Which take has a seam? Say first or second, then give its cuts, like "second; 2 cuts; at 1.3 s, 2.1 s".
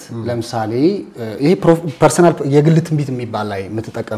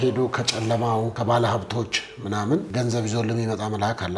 second; 2 cuts; at 1.1 s, 2.7 s